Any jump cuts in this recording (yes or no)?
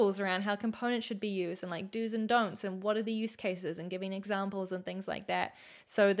no